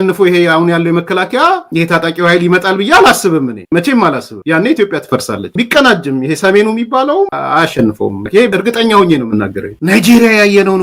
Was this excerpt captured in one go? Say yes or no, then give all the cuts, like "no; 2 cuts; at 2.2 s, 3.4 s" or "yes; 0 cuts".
no; 4 cuts; at 5.5 s, 7.3 s, 8.5 s, 9.7 s